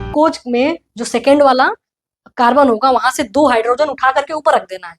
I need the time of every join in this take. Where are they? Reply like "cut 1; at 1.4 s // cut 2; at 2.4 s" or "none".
none